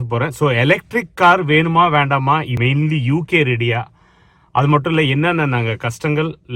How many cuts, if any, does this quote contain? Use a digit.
1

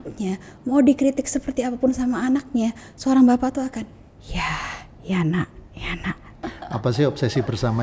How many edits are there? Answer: 1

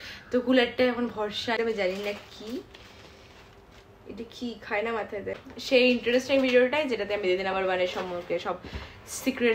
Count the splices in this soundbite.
2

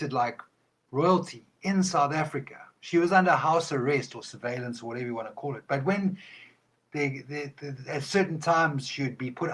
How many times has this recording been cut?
0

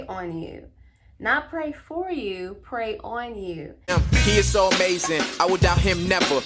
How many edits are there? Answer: 1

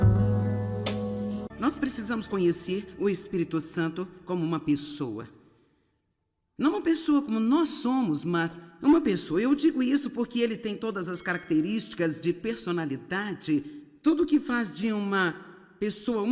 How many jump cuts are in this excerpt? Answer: 1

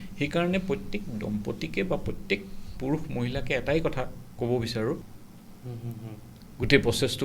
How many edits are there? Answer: 1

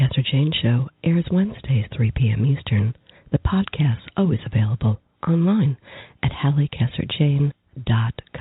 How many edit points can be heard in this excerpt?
0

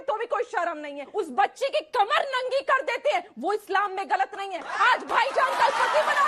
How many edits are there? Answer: 2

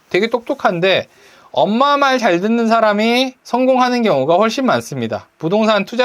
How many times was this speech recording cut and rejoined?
1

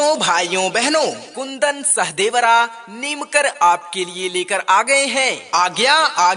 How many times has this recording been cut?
2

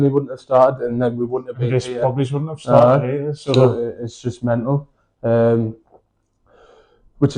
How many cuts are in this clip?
0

